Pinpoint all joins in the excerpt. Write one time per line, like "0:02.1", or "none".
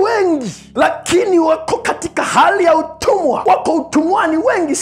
none